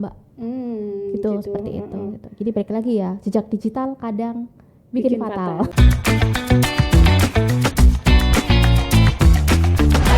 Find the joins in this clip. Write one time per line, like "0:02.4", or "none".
0:05.7